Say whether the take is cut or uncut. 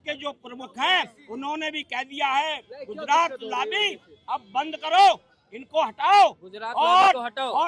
uncut